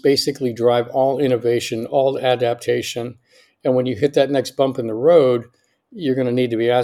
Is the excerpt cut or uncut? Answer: uncut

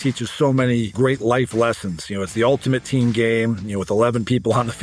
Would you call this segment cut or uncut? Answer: cut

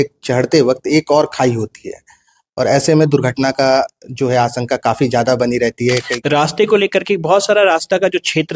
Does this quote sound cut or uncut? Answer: cut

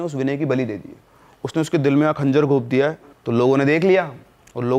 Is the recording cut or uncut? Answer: cut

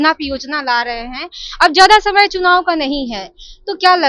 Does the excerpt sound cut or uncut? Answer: uncut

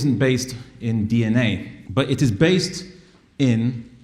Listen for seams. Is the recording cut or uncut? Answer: cut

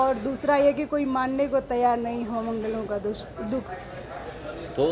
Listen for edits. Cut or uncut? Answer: uncut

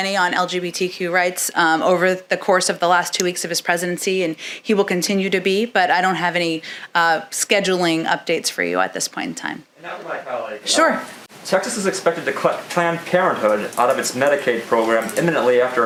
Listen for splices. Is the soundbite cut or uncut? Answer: uncut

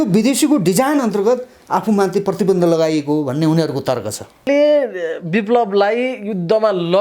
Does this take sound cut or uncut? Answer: cut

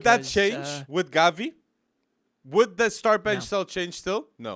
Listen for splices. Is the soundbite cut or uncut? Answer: uncut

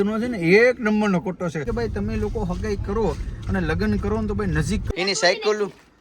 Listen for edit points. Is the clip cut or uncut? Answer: cut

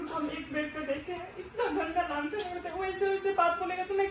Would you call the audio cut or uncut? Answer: uncut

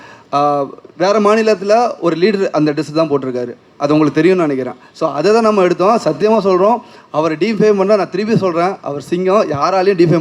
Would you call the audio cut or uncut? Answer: uncut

